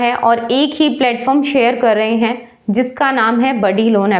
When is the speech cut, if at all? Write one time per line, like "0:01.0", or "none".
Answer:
none